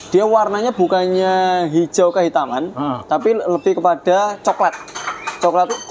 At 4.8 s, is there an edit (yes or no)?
no